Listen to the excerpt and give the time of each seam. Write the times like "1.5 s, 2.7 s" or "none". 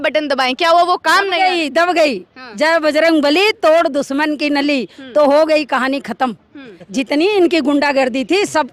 none